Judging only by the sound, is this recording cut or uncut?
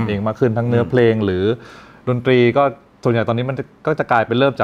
uncut